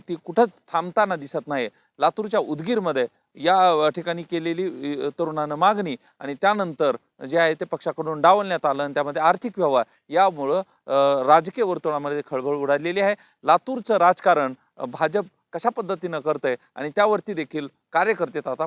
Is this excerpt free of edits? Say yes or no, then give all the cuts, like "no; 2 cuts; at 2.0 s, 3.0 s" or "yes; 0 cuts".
yes; 0 cuts